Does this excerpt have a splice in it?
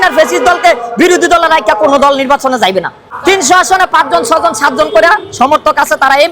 yes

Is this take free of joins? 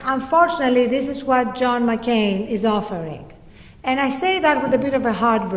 no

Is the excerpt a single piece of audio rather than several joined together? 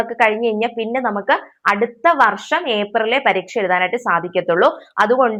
yes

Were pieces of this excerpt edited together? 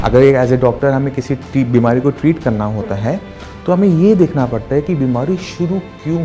no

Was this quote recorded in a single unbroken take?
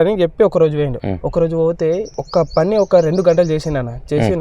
no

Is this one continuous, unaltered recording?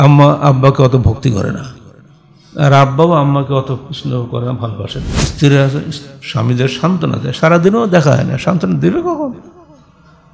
no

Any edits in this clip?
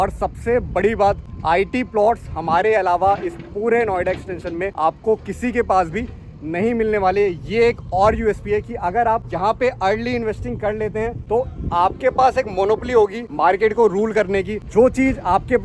yes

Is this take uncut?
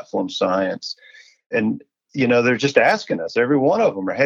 no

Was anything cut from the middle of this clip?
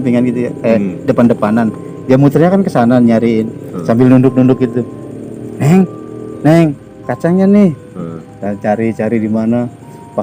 no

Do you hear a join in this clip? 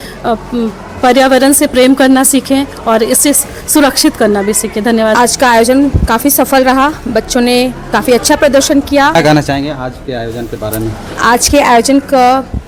no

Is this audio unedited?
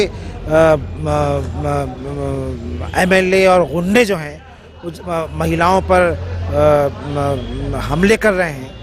yes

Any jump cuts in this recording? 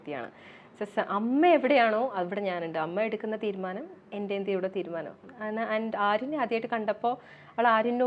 no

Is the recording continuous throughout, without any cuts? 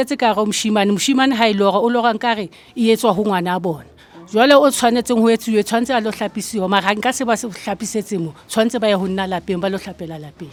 yes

